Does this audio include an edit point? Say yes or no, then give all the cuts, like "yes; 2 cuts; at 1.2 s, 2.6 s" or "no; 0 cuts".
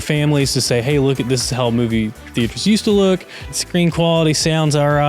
yes; 1 cut; at 3.4 s